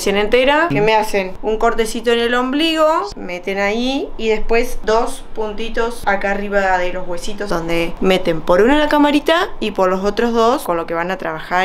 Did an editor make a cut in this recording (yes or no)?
yes